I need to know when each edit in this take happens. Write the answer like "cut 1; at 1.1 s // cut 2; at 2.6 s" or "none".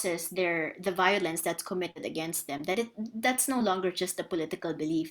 none